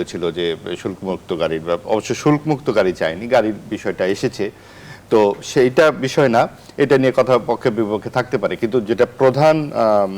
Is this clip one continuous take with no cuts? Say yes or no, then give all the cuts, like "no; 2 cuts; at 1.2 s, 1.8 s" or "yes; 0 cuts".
yes; 0 cuts